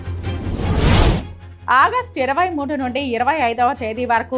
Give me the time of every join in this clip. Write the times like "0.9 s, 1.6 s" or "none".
none

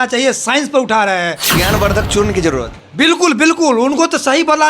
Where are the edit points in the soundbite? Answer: 1.4 s

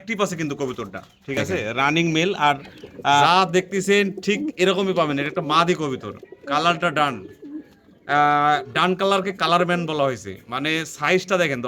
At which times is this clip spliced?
3.2 s

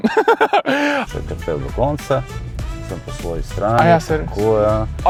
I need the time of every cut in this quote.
none

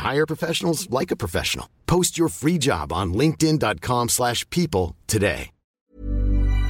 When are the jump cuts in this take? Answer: 5.8 s

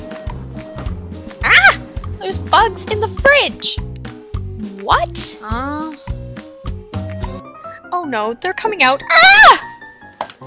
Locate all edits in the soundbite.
4.8 s

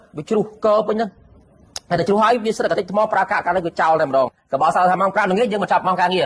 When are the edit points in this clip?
4.4 s

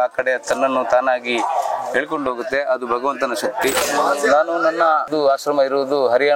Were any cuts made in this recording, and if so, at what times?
3.8 s, 5.1 s

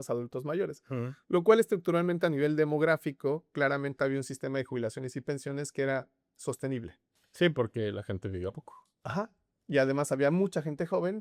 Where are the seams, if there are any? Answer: none

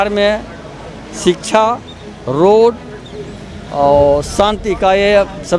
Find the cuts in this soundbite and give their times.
none

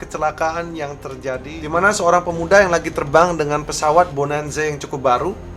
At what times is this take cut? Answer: 1.6 s

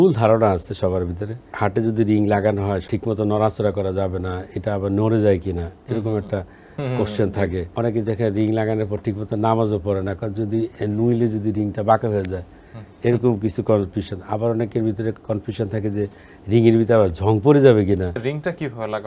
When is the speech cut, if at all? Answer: 1.5 s, 2.8 s, 7.7 s, 18.2 s

